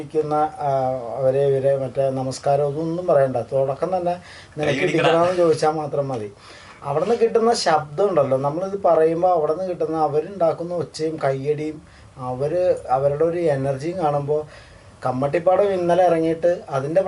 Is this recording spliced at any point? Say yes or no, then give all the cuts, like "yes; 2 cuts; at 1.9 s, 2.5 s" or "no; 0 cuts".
no; 0 cuts